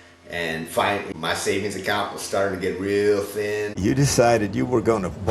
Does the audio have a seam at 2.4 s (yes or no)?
no